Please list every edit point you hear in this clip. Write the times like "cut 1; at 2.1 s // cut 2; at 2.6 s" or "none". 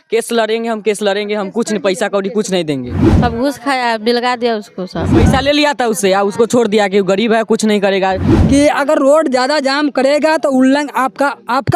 cut 1; at 3.0 s // cut 2; at 5.1 s // cut 3; at 8.3 s